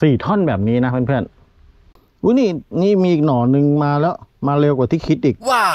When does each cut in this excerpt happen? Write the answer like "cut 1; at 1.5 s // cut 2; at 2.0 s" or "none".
none